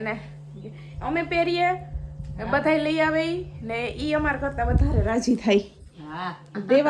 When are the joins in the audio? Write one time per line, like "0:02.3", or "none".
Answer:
none